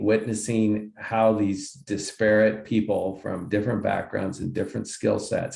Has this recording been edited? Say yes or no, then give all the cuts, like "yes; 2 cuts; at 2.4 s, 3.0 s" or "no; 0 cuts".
no; 0 cuts